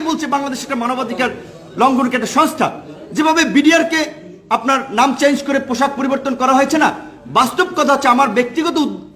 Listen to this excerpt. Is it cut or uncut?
uncut